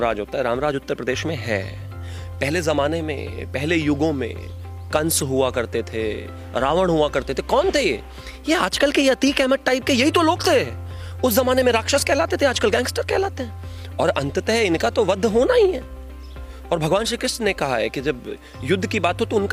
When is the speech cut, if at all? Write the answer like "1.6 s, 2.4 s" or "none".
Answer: none